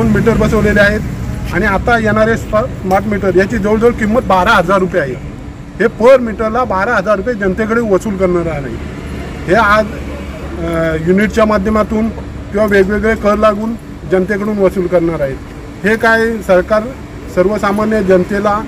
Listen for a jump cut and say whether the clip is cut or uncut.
uncut